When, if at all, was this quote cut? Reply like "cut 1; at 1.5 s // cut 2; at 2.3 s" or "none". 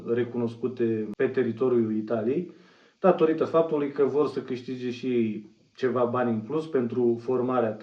none